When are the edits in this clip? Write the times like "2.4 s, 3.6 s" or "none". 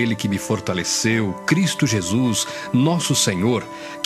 none